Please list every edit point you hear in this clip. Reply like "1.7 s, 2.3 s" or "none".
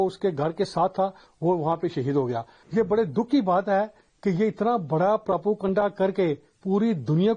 2.5 s